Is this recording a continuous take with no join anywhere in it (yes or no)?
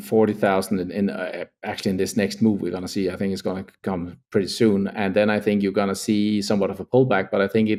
yes